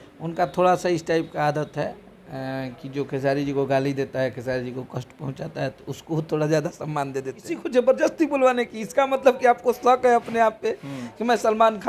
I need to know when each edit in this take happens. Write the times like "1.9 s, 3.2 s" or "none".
7.6 s